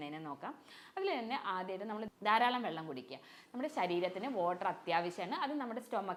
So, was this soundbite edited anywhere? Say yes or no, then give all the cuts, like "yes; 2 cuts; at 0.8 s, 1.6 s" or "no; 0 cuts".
no; 0 cuts